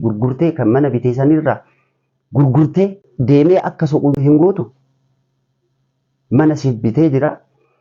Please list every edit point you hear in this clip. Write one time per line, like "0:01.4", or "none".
0:03.1
0:04.1